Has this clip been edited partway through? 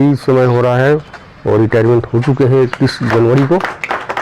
no; 0 cuts

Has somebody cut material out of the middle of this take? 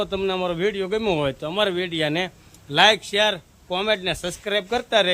no; 0 cuts

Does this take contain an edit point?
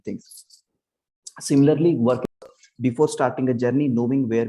yes; 1 cut; at 2.2 s

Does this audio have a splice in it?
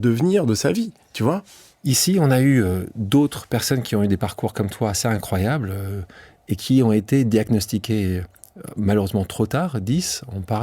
no; 0 cuts

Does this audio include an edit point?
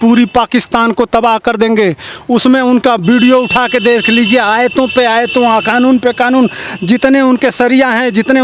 no; 0 cuts

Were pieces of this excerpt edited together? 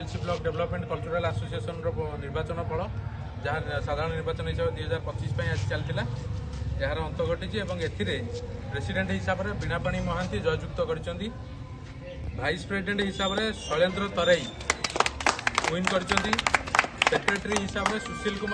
no; 0 cuts

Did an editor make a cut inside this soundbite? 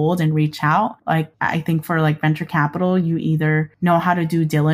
yes; 2 cuts; at 1.1 s, 3.7 s

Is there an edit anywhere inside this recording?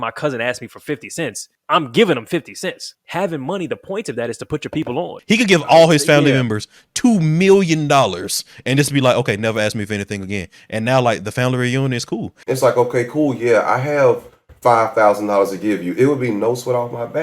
yes; 4 cuts; at 1.5 s, 2.9 s, 5.2 s, 12.3 s

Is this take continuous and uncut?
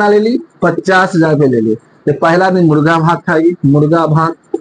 yes; 0 cuts

